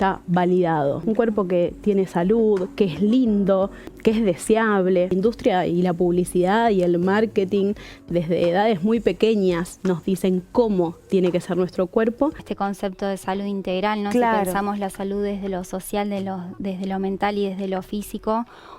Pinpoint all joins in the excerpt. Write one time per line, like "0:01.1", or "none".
0:01.0
0:03.9
0:05.1
0:12.5